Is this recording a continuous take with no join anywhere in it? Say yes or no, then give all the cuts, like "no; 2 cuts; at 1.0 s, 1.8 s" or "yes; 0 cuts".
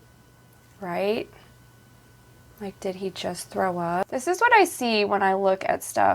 no; 1 cut; at 4.0 s